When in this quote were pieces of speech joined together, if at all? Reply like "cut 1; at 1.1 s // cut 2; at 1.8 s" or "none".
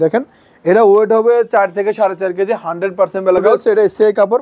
cut 1; at 3.5 s